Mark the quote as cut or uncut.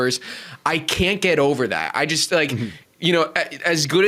uncut